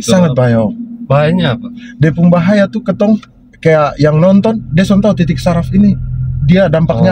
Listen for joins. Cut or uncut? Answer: uncut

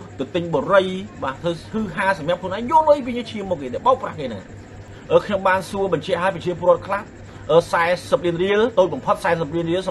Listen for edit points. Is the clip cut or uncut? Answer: cut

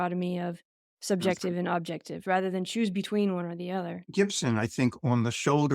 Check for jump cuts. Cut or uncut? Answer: cut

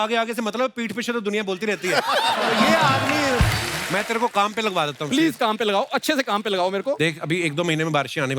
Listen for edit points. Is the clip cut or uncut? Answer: cut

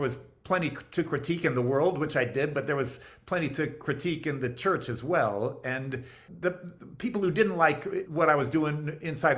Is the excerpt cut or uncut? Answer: cut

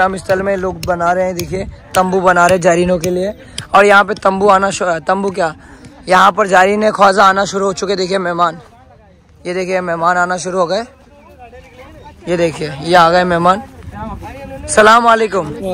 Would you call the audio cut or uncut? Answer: uncut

